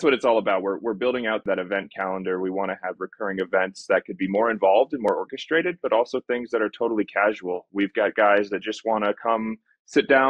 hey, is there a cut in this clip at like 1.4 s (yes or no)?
yes